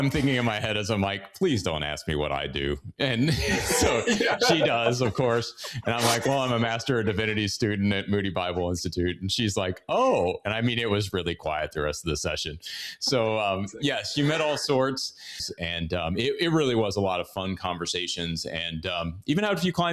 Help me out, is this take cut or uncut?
cut